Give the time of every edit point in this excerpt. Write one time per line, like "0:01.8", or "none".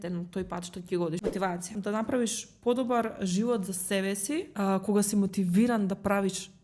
0:01.6
0:04.5